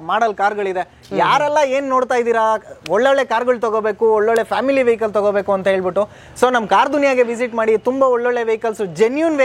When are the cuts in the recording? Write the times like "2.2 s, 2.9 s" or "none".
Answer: none